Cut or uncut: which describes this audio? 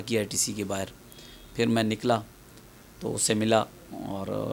uncut